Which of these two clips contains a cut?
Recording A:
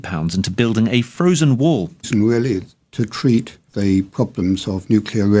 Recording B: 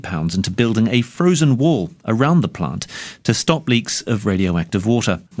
B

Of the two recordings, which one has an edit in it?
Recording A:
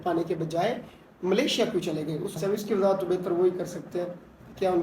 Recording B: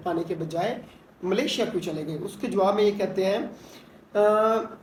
A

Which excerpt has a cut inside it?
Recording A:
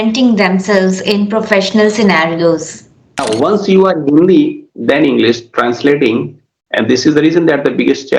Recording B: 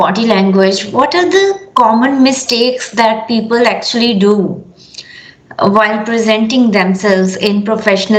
A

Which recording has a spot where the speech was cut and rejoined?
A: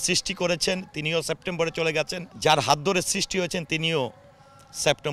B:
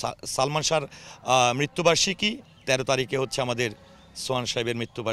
A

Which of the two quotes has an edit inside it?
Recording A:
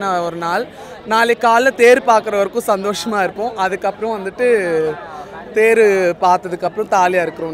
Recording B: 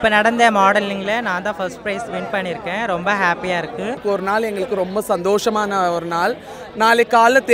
B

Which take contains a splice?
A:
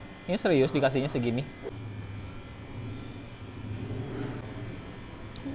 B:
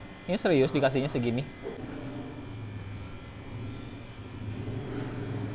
A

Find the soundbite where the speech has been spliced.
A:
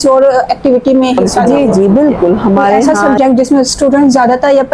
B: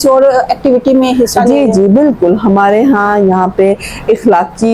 A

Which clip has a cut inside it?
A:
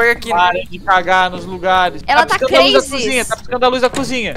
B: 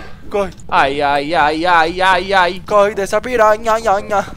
A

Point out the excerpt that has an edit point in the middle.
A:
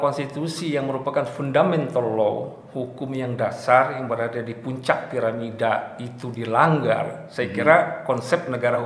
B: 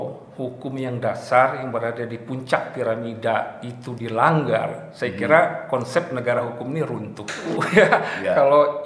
B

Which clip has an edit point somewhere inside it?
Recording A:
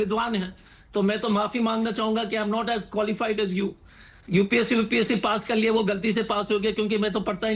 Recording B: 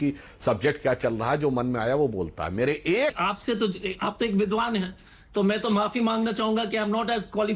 B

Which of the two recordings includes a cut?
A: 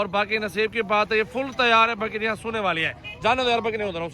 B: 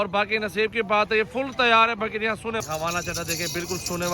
B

